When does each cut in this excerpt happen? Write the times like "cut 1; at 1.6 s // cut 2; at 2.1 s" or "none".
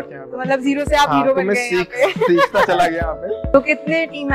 cut 1; at 3.4 s